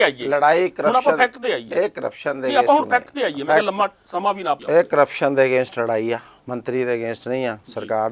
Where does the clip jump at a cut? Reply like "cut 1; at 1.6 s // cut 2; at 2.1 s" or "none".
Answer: cut 1; at 4.6 s // cut 2; at 6.4 s